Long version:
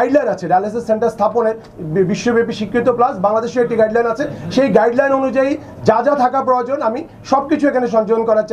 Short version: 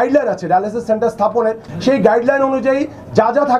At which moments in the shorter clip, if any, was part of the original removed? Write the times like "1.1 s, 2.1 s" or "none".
1.7 s